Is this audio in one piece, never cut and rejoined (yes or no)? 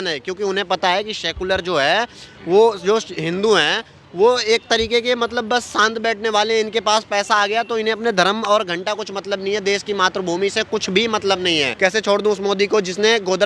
no